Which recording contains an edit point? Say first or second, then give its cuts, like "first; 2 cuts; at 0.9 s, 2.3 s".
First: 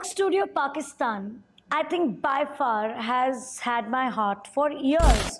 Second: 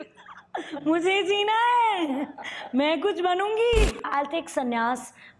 second; 1 cut; at 4.1 s